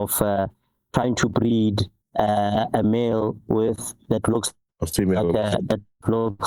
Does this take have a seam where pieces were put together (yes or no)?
yes